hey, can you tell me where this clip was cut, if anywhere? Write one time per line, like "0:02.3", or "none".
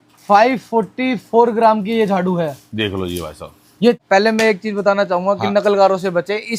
0:04.0